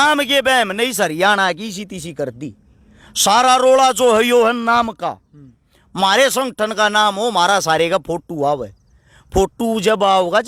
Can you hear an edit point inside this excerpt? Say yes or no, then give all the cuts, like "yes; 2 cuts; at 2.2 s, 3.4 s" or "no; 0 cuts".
no; 0 cuts